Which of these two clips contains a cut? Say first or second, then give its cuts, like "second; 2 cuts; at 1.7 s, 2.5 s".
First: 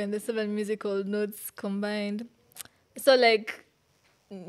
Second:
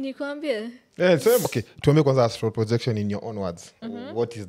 second; 1 cut; at 1.5 s